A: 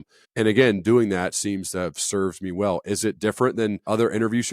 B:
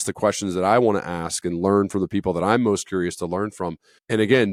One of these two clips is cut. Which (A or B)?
A